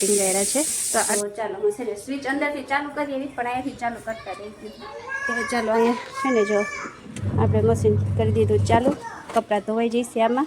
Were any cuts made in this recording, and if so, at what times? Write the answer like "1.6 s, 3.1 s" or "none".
1.1 s